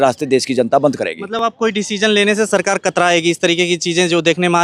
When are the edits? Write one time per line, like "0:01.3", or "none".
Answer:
none